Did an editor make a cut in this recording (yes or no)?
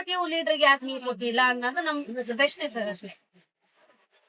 no